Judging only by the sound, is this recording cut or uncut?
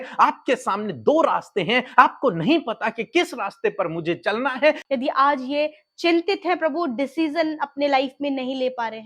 cut